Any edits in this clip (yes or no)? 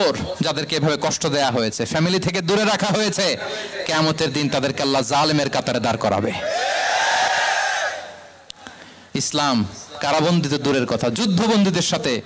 no